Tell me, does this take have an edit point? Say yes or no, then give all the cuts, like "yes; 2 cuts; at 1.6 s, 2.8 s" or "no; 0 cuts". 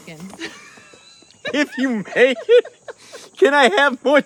no; 0 cuts